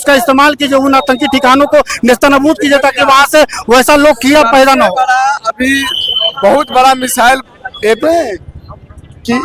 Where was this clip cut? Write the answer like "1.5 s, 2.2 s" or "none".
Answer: 8.0 s